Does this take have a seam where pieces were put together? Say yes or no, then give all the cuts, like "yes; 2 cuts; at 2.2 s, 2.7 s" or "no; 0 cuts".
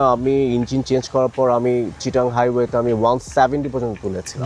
no; 0 cuts